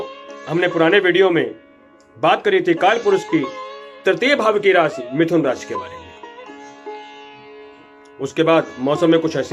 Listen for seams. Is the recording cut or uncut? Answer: cut